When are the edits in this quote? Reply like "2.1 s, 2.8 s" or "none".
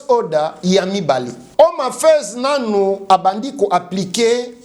1.4 s

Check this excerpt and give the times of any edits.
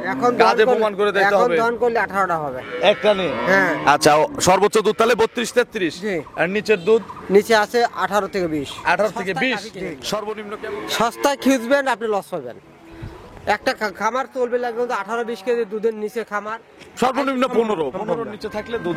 10.6 s

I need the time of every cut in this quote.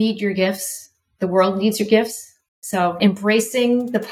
3.0 s

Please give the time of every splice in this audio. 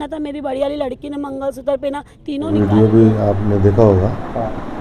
2.5 s

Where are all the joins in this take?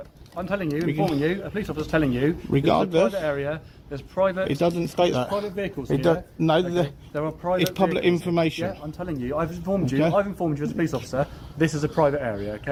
none

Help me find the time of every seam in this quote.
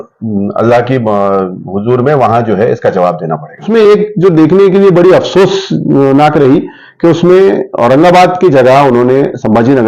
3.7 s

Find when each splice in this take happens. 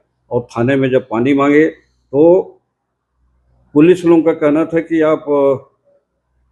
none

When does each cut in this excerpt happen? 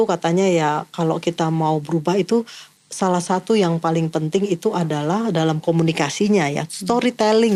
none

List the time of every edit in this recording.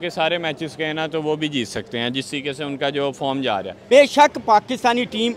3.7 s

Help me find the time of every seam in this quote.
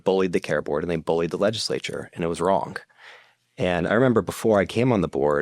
none

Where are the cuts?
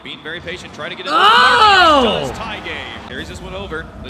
3.1 s

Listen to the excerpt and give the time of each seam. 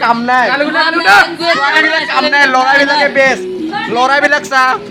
none

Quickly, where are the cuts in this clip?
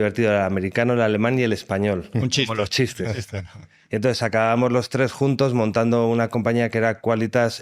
none

